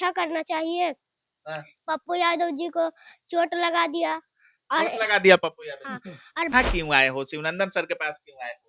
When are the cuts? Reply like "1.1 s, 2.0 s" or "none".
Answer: 6.5 s